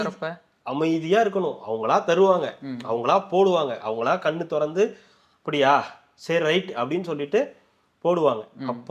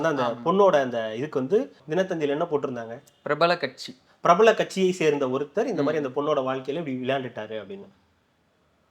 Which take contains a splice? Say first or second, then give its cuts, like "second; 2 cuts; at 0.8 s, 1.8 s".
second; 1 cut; at 1.8 s